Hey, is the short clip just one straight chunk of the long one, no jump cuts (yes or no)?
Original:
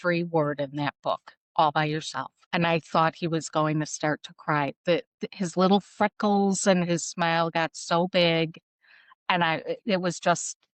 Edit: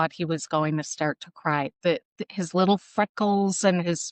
yes